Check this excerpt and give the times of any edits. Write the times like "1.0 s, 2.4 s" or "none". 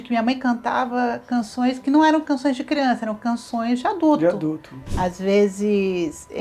4.8 s